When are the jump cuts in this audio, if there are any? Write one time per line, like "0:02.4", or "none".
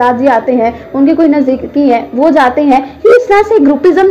none